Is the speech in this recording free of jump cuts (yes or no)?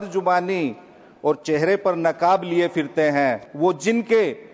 no